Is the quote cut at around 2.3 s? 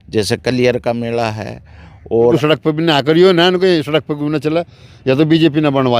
yes; 1 cut; at 2.3 s

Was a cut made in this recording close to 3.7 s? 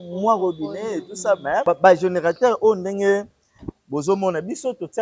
no; 1 cut; at 1.6 s

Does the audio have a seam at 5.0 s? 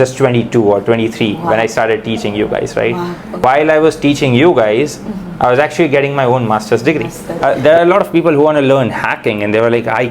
no; 2 cuts; at 3.4 s, 7.2 s

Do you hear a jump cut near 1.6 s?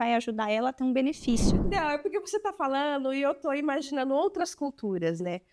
yes; 1 cut; at 1.6 s

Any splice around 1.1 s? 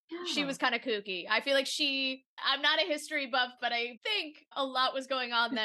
no; 2 cuts; at 2.4 s, 4.0 s

